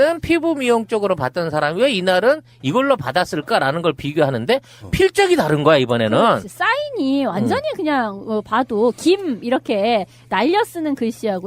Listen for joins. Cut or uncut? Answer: cut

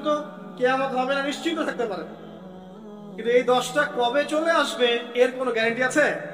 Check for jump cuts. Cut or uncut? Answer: uncut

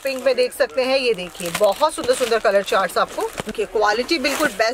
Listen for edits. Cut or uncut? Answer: cut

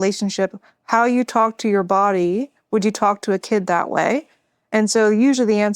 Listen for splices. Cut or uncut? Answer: uncut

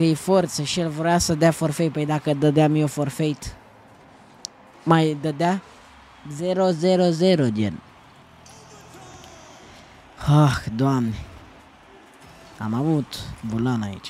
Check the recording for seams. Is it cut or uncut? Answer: uncut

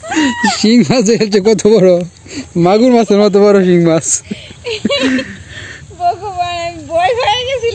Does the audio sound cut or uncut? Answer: uncut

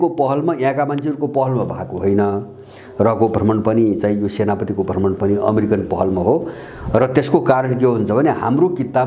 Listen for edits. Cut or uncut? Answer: uncut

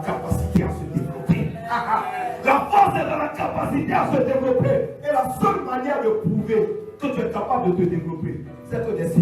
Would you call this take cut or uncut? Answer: uncut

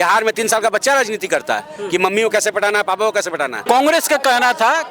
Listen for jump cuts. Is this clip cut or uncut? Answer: cut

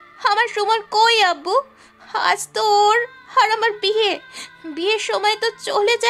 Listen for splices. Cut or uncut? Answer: uncut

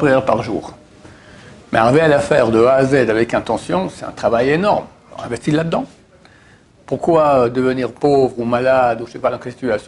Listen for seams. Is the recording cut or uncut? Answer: uncut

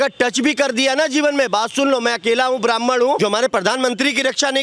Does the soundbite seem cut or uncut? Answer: cut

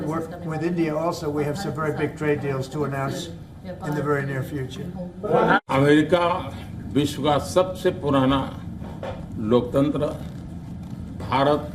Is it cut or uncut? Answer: cut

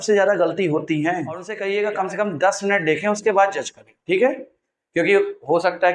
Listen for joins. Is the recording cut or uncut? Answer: cut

